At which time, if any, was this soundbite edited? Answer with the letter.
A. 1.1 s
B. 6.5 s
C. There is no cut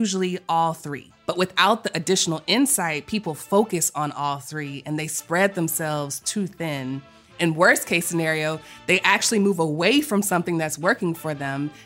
A